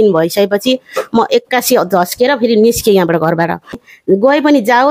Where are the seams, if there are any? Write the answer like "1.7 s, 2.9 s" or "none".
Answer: 3.9 s